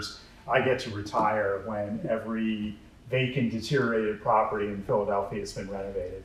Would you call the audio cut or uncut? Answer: uncut